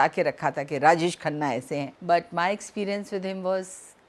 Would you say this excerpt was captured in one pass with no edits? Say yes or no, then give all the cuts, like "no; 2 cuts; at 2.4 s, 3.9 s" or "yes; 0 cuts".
no; 1 cut; at 1.9 s